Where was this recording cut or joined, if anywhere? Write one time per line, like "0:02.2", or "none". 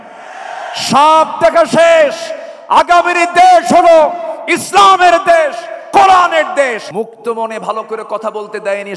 0:06.9